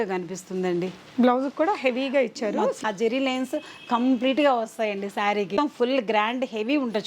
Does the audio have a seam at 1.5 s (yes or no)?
no